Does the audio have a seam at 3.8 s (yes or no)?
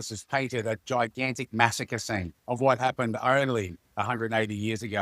yes